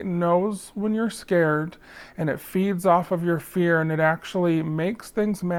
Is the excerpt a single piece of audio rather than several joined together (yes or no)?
yes